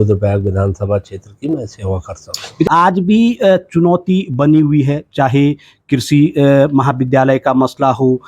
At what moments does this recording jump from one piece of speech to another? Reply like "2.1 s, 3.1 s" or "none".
2.7 s